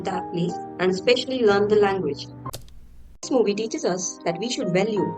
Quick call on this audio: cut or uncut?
cut